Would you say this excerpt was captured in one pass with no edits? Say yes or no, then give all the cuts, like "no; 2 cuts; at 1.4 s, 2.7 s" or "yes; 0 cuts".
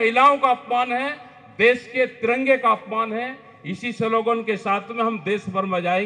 yes; 0 cuts